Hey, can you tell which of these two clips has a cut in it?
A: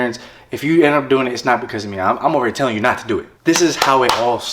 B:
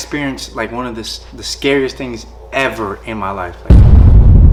A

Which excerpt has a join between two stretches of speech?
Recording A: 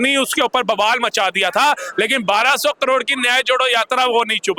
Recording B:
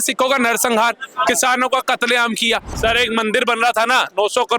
B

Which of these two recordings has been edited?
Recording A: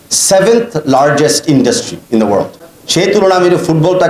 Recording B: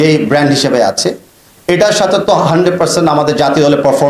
A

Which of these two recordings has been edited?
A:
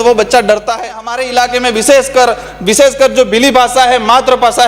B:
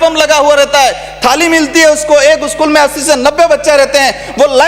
A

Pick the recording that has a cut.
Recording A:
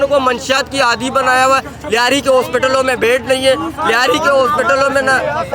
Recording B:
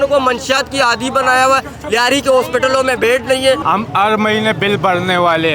B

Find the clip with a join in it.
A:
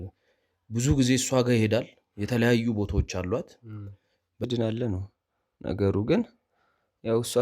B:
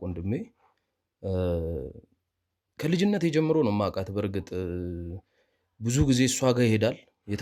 A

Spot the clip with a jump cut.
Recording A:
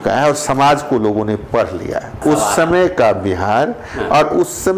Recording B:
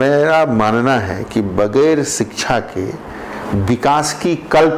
A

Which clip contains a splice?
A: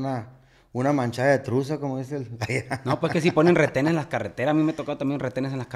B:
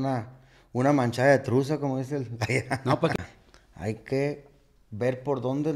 B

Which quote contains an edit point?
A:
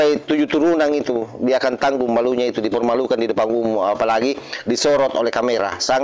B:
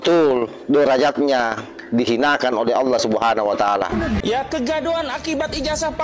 B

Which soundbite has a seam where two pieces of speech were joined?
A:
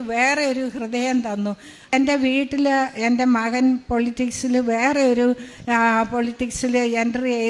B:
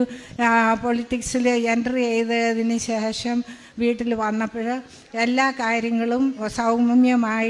A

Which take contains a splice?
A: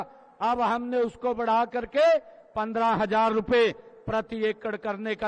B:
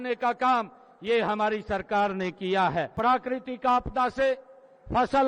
B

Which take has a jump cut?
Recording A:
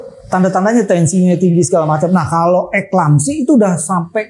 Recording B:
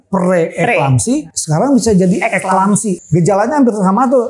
B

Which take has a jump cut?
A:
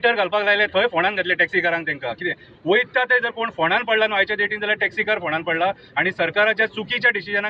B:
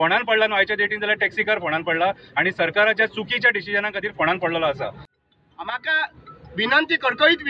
B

